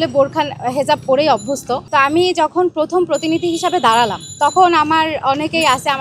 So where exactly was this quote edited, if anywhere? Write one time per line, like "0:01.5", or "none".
0:01.8

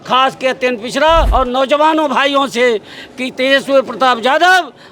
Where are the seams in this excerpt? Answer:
0:01.3

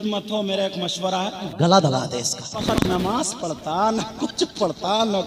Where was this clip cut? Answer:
0:01.5
0:02.7

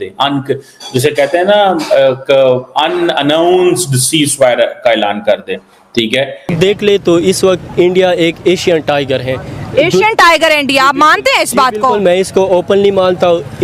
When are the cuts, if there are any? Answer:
0:06.5

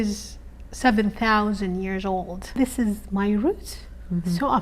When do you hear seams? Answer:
0:02.6

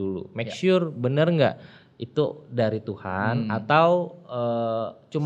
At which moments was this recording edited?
none

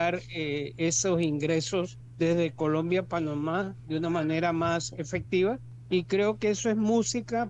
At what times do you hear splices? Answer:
0:02.0
0:05.7

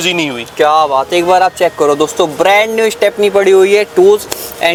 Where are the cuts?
none

